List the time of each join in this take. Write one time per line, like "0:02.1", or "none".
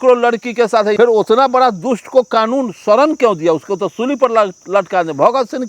0:00.9